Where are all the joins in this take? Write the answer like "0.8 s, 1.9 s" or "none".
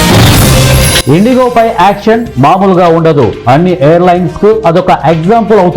1.0 s